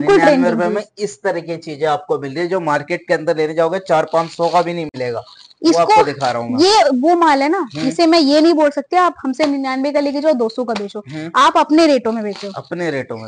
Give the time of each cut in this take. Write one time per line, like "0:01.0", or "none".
none

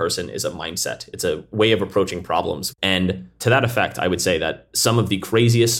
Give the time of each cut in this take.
none

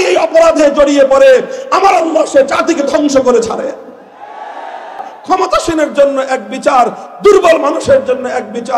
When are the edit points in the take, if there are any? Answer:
0:05.2

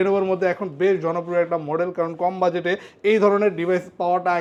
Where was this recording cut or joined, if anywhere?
none

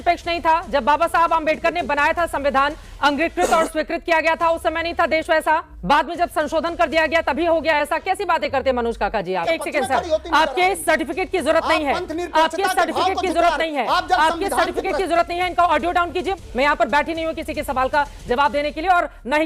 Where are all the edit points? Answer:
0:05.7
0:09.4
0:16.4

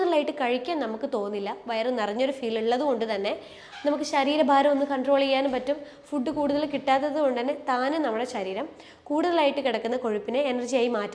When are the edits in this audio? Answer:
none

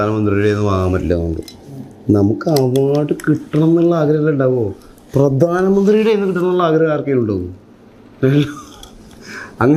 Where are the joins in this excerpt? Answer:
none

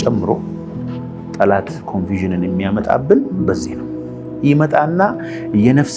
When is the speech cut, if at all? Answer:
none

